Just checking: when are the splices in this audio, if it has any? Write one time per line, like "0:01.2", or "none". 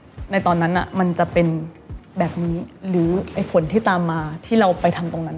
none